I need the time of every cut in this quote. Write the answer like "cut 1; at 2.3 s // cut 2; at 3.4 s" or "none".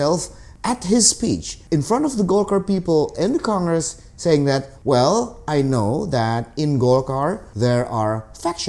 cut 1; at 1.5 s // cut 2; at 4.7 s // cut 3; at 7.5 s